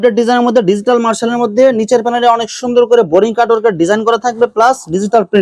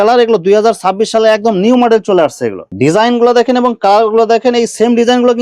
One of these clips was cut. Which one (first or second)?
second